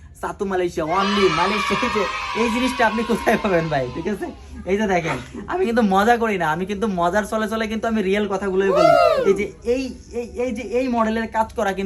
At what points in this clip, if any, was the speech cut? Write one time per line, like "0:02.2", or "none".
0:01.6